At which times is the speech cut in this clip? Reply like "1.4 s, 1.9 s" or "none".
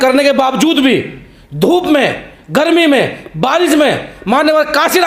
none